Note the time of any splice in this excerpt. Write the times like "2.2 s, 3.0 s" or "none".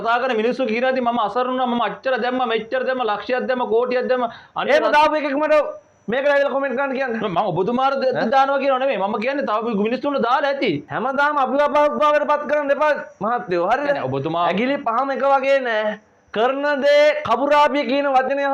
none